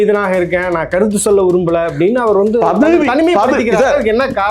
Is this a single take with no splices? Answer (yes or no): yes